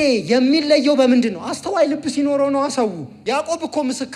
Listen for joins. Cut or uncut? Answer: cut